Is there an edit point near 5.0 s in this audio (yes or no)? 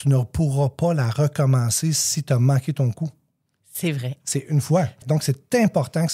yes